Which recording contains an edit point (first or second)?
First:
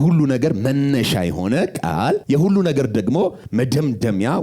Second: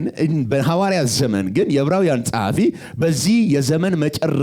first